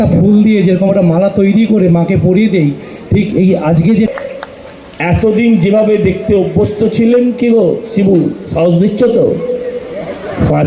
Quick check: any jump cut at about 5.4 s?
no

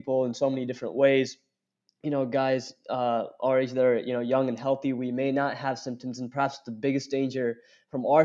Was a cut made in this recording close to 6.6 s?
no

